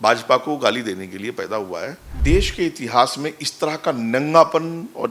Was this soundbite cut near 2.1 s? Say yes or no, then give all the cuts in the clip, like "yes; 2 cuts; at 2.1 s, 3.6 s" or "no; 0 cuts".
yes; 1 cut; at 2.1 s